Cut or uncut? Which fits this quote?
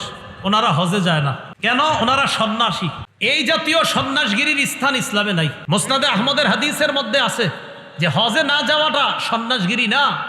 cut